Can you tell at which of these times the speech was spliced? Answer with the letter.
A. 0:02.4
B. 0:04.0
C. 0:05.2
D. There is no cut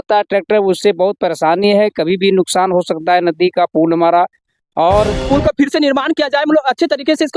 C